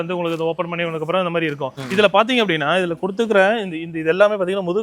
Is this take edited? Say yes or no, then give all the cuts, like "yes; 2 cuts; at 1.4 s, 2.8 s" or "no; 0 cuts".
yes; 1 cut; at 1.8 s